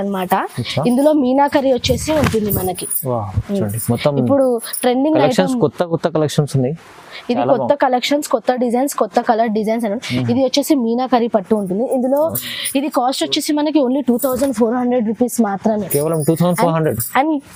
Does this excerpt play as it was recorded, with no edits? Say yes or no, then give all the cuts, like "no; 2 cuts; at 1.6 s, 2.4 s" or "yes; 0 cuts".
yes; 0 cuts